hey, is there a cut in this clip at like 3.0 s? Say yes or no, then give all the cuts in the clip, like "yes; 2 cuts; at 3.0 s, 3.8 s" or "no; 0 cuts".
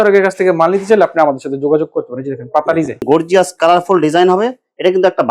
yes; 1 cut; at 3.0 s